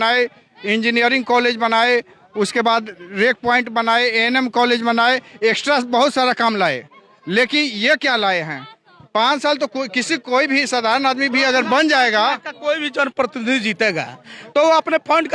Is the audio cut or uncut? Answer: uncut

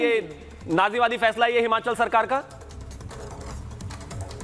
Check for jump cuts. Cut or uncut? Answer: uncut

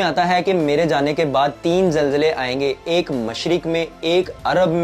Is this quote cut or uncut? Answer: uncut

